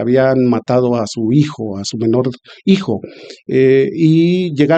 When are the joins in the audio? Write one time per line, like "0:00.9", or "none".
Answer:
none